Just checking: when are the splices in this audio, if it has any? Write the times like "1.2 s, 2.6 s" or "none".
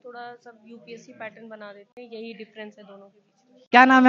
none